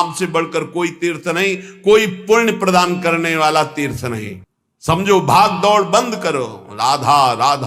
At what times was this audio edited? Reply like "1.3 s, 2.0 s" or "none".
none